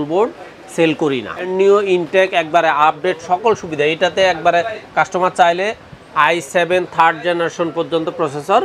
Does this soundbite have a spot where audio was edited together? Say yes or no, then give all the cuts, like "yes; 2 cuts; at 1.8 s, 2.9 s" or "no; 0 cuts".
yes; 1 cut; at 1.5 s